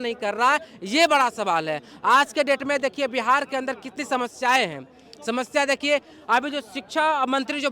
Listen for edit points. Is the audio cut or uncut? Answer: uncut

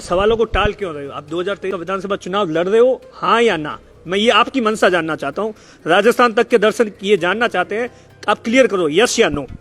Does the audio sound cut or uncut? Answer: cut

